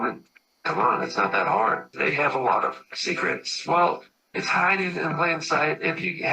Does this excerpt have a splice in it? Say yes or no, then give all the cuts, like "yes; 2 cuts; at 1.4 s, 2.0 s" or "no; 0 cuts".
yes; 1 cut; at 1.9 s